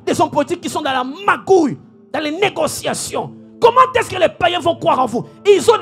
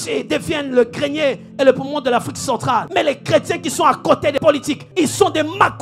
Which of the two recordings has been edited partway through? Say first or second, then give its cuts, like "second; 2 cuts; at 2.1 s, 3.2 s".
second; 2 cuts; at 2.9 s, 4.4 s